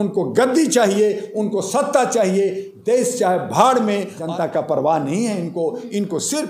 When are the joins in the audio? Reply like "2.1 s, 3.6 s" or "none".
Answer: 4.2 s

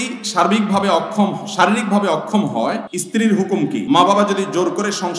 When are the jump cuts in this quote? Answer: 2.9 s, 3.8 s

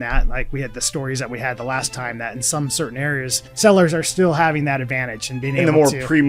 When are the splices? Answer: 3.4 s

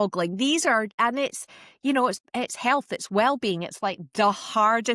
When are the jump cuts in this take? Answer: 0.9 s

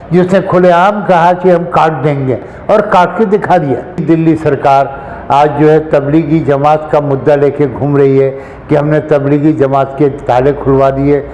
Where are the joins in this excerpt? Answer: 4.0 s

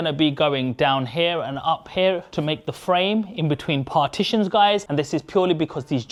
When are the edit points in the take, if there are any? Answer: none

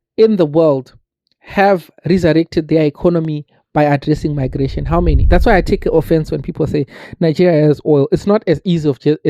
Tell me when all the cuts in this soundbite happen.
5.3 s

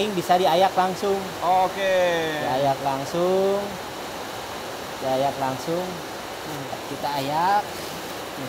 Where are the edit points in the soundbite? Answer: none

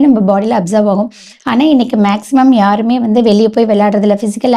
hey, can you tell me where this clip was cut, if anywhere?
none

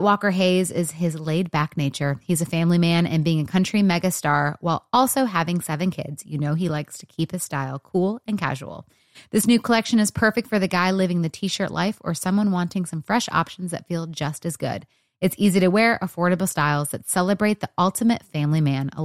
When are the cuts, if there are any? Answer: none

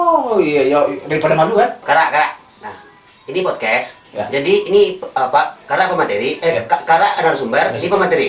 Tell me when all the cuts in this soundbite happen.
1.8 s

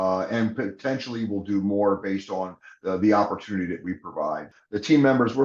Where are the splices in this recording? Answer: 4.5 s

